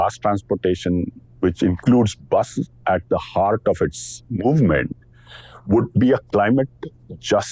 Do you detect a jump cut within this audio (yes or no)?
no